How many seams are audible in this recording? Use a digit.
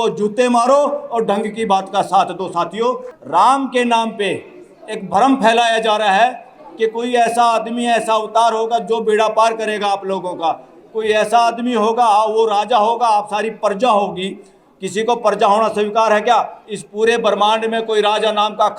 1